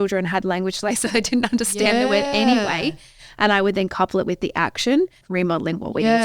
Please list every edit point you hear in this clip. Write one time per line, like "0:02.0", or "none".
0:05.2